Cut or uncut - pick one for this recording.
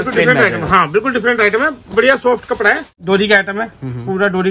cut